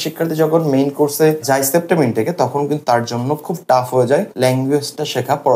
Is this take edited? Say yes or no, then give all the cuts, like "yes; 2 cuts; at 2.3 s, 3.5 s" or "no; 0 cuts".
yes; 1 cut; at 4.3 s